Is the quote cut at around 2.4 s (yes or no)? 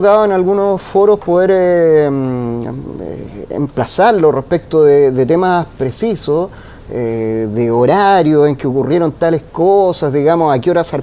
no